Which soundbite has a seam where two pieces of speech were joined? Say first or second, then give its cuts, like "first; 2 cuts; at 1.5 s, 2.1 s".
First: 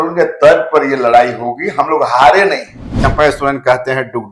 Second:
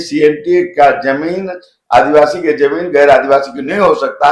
first; 1 cut; at 2.8 s